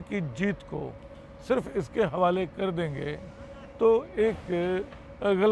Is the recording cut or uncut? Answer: uncut